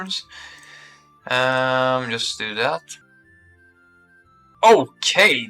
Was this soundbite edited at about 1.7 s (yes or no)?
no